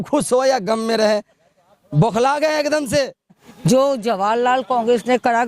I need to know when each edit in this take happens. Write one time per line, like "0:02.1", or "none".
0:03.5